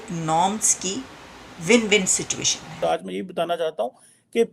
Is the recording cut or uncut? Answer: cut